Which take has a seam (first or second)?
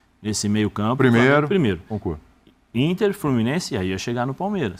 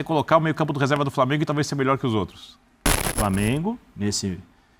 second